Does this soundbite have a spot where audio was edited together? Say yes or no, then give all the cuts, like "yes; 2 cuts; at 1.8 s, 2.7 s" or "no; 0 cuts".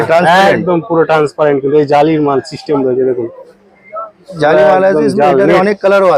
no; 0 cuts